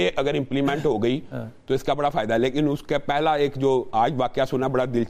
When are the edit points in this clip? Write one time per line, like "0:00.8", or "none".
none